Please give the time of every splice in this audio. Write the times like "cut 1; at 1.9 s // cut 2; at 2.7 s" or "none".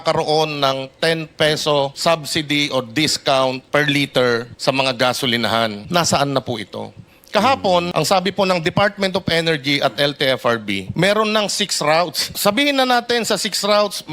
cut 1; at 1.9 s // cut 2; at 3.6 s // cut 3; at 4.5 s // cut 4; at 5.8 s // cut 5; at 7.9 s // cut 6; at 10.9 s // cut 7; at 12.2 s